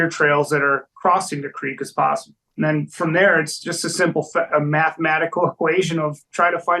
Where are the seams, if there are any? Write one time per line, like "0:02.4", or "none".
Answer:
0:02.4